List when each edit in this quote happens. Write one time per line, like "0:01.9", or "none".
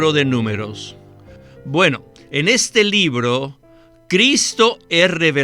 0:01.3
0:03.7